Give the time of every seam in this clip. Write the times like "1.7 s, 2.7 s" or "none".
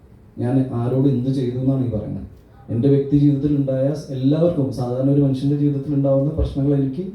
none